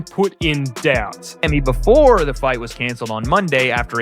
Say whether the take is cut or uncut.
cut